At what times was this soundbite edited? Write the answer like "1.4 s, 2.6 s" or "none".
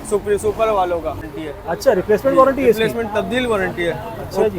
1.3 s